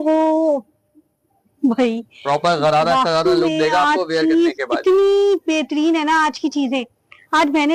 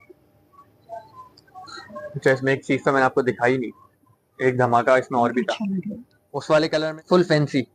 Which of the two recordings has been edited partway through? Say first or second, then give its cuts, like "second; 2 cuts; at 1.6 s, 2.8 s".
second; 1 cut; at 6.8 s